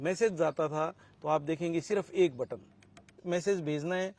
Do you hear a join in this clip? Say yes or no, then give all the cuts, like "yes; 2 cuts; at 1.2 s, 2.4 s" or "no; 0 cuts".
yes; 1 cut; at 3.2 s